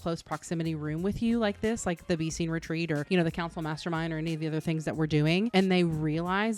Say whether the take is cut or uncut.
uncut